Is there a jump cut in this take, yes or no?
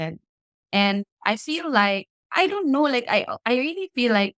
yes